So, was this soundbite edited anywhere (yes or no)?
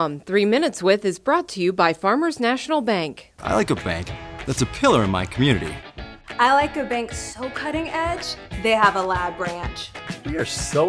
no